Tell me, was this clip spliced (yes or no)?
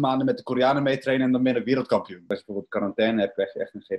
yes